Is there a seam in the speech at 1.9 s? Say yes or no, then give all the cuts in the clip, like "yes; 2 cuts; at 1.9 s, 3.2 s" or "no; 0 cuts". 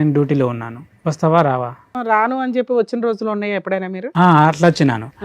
yes; 1 cut; at 1.9 s